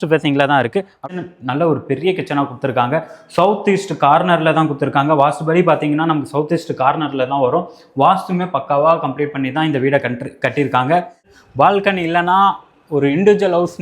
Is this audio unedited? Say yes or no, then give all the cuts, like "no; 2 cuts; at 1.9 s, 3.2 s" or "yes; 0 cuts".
no; 2 cuts; at 1.0 s, 11.4 s